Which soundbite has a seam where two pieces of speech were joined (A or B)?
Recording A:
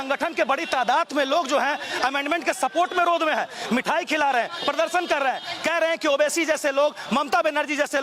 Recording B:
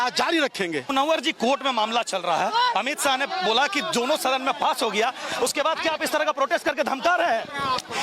B